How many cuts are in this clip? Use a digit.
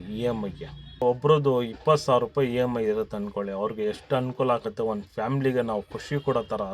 1